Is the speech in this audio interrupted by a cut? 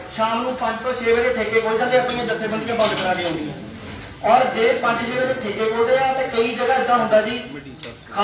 no; 0 cuts

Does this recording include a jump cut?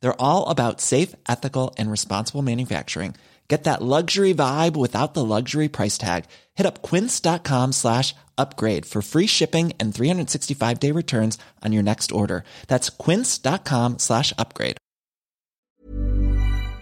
yes; 1 cut; at 15.6 s

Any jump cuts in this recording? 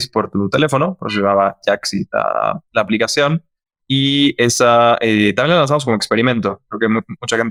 no; 0 cuts

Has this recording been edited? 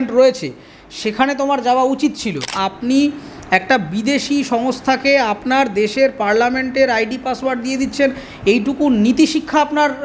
yes; 1 cut; at 2.6 s

